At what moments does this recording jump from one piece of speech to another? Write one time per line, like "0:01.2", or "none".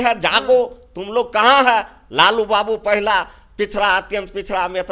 none